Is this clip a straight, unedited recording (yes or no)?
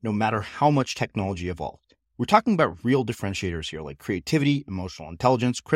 yes